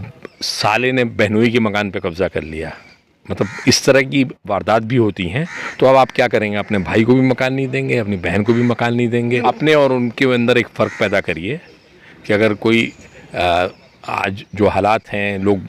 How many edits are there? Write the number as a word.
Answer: zero